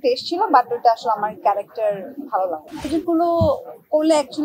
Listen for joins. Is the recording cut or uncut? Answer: cut